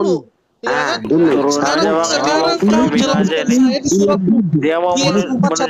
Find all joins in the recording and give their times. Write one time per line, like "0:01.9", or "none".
none